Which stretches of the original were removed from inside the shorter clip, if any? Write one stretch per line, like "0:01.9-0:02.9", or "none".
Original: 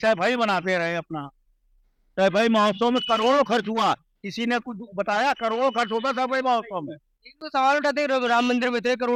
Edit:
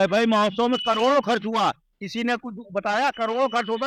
none